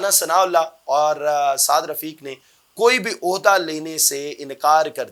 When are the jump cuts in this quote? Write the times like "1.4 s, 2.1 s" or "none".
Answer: none